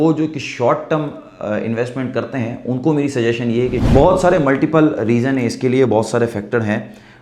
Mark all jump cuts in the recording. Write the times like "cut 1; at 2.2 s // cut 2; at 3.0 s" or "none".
cut 1; at 3.8 s